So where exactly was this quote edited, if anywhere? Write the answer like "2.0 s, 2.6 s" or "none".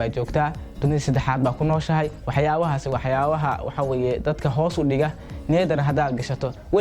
none